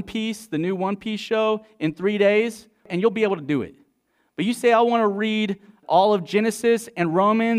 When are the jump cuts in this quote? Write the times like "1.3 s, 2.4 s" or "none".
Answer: 2.9 s, 5.8 s